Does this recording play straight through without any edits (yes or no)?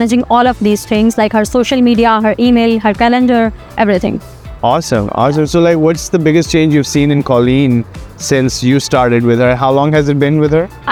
yes